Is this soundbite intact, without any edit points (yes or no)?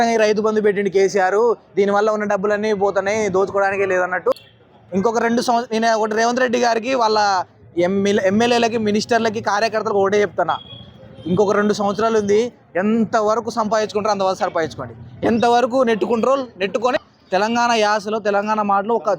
no